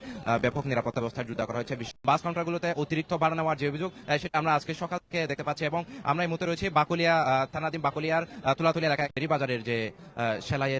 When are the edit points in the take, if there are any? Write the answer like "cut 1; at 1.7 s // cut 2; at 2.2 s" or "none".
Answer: cut 1; at 1.9 s // cut 2; at 9.1 s

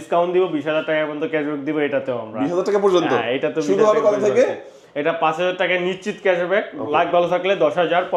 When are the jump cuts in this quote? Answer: none

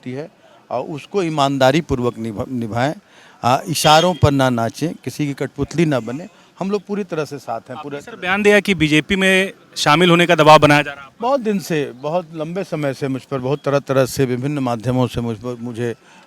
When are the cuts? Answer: none

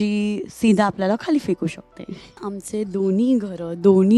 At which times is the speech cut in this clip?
cut 1; at 2.5 s

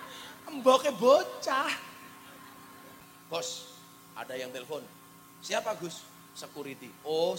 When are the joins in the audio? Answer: cut 1; at 3.1 s

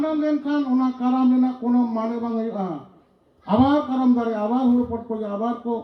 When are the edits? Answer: none

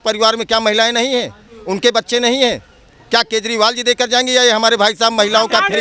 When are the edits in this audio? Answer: none

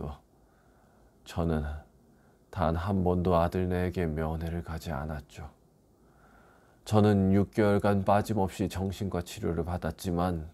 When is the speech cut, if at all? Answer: cut 1; at 6.8 s

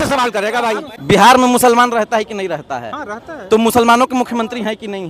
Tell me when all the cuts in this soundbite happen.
cut 1; at 0.9 s

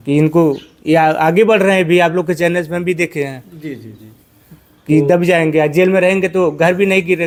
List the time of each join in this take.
none

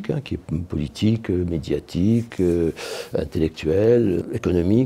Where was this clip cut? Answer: none

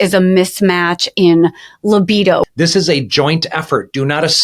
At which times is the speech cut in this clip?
cut 1; at 2.4 s

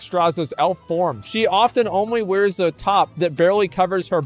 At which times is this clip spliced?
cut 1; at 1.2 s

